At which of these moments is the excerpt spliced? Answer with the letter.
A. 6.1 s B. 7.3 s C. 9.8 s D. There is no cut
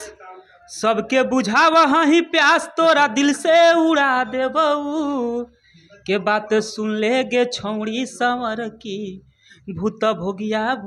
D